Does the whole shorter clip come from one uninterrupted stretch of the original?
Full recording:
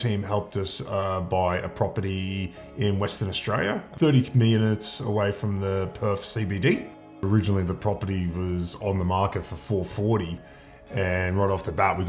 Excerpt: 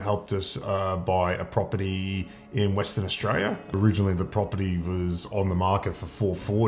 no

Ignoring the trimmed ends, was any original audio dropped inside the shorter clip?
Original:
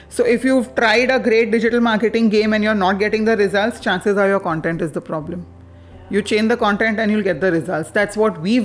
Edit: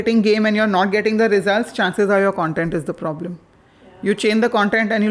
no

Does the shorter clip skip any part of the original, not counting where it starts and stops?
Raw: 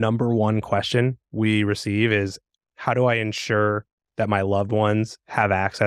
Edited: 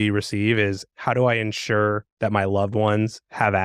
yes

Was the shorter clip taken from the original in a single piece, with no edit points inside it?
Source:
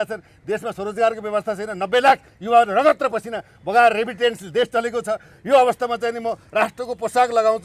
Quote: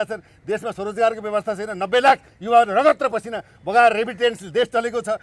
yes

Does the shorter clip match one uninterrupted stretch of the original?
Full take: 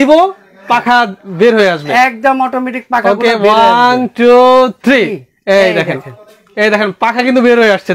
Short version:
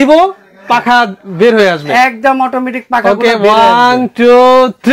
yes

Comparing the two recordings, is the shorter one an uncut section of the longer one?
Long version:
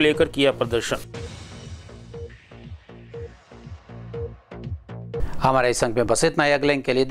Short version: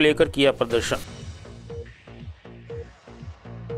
no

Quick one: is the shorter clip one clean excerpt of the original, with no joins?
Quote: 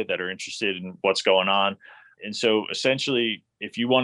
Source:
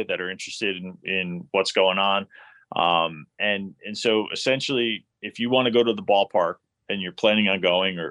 no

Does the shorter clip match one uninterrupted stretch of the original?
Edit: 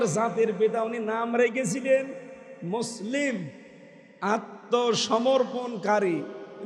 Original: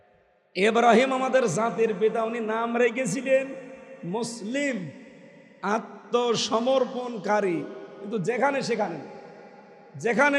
yes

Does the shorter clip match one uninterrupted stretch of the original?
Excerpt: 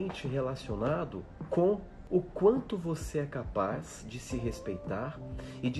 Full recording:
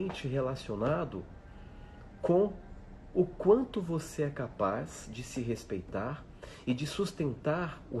no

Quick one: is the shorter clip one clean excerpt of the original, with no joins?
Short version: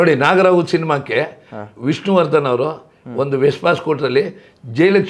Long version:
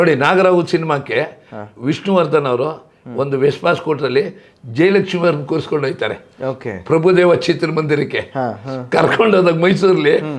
yes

